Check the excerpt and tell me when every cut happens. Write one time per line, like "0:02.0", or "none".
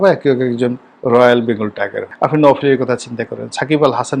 0:02.0